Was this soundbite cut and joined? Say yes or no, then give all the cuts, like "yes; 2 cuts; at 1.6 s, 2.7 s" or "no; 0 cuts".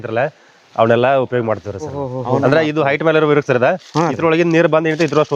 yes; 1 cut; at 2.1 s